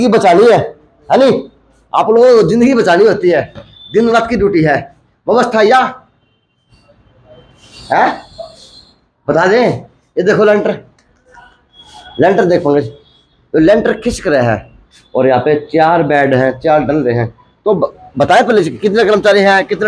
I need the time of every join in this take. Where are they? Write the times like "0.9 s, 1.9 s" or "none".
none